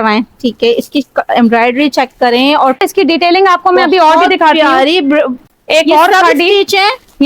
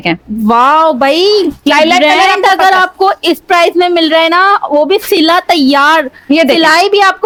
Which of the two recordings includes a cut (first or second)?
first